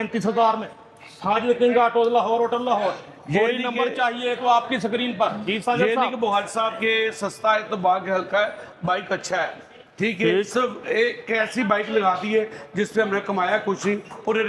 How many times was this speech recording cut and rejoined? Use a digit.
0